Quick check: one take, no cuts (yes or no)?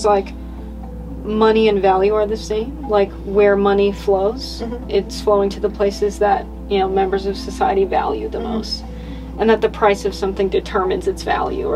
yes